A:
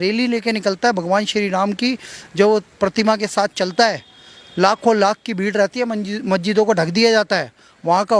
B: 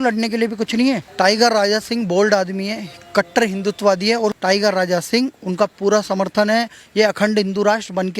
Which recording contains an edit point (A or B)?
B